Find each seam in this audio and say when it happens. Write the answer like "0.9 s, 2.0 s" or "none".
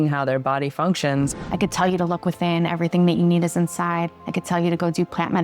1.4 s, 4.2 s